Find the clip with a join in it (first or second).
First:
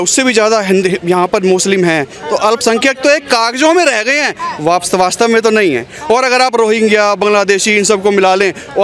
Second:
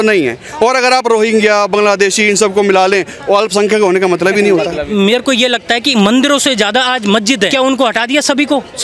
second